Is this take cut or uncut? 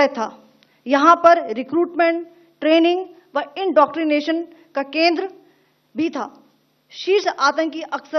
uncut